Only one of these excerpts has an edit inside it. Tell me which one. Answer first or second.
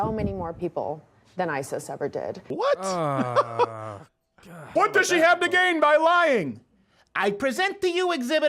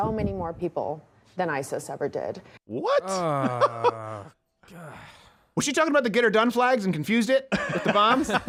first